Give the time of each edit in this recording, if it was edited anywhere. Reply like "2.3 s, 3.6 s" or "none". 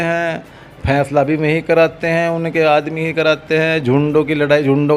none